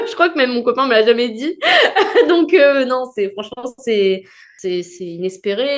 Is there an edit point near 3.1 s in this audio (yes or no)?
no